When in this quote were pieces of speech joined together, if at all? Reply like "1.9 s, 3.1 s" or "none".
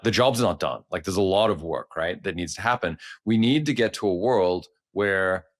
none